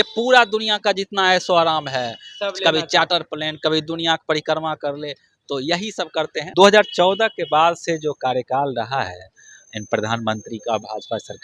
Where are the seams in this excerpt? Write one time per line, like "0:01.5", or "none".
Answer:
0:06.5